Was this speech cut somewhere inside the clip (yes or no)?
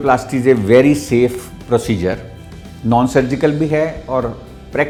no